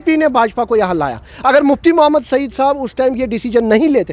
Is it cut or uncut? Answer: uncut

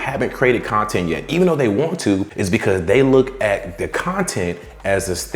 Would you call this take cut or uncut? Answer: uncut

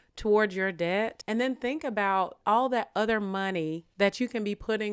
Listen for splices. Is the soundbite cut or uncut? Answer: cut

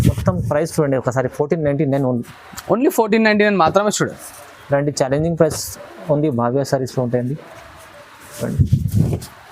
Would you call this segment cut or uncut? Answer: uncut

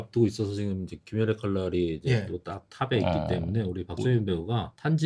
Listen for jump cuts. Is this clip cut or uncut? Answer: uncut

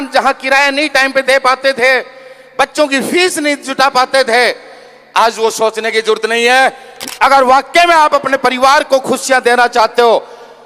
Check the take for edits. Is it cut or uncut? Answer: cut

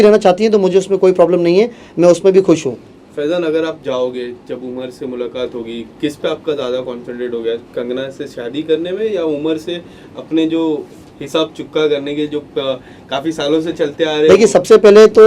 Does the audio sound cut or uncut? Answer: uncut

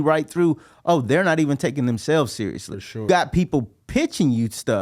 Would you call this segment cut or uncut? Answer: cut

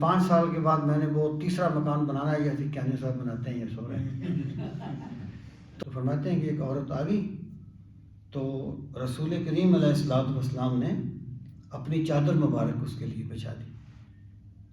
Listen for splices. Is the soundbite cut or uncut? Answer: cut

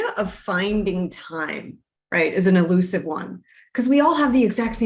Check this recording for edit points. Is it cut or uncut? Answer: uncut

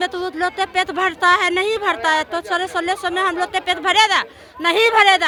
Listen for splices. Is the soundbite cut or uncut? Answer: uncut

